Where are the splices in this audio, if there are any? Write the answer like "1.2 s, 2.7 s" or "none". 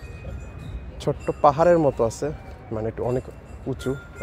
none